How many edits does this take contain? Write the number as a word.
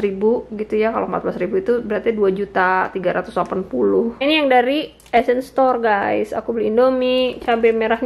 one